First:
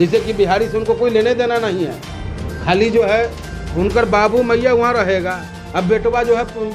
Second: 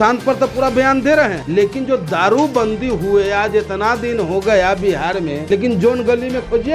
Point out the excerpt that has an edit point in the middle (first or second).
second